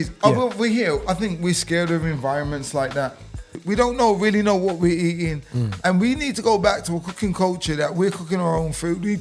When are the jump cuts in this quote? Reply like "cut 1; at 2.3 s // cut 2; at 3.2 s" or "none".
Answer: cut 1; at 3.6 s